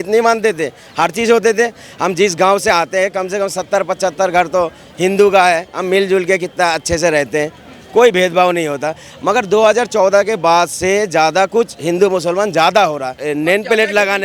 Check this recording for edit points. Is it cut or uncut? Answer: cut